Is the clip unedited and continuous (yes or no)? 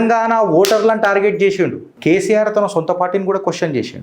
no